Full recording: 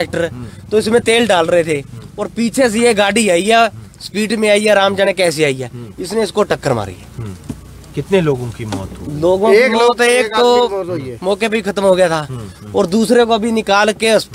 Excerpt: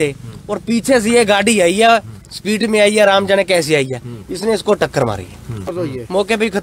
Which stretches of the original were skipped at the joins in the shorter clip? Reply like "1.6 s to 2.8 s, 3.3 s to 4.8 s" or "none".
7.4 s to 10.8 s